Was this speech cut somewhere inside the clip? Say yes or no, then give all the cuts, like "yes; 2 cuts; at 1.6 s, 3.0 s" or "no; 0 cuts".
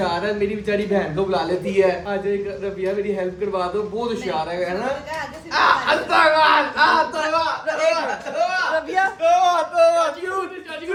no; 0 cuts